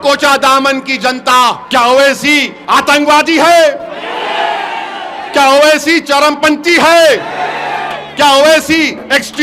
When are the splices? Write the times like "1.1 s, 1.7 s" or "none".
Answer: 1.6 s, 2.5 s

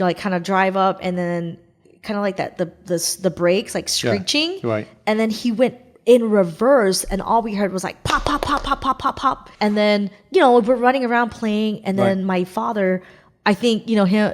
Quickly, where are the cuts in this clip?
9.5 s

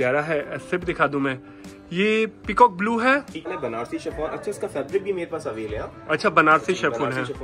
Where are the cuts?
3.5 s

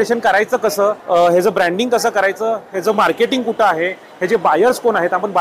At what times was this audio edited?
none

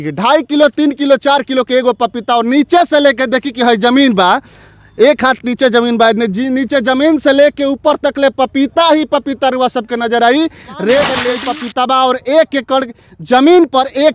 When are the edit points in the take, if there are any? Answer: 11.3 s

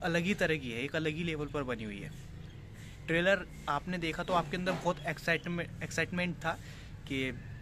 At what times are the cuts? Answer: none

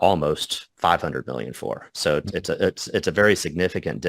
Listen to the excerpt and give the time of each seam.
none

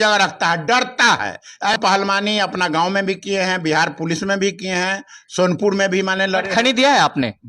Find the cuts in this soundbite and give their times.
1.8 s

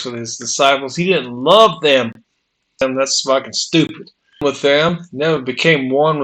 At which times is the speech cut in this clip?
2.8 s, 4.4 s

